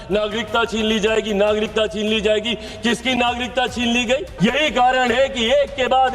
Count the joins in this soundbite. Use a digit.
1